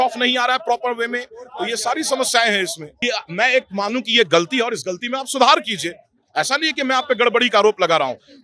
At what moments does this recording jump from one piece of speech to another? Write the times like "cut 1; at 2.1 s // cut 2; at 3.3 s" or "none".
cut 1; at 3.1 s